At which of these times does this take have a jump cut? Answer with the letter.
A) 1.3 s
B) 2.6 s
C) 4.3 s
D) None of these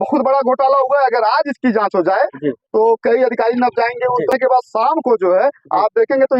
C